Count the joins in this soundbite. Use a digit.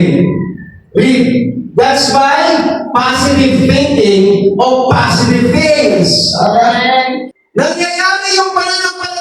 1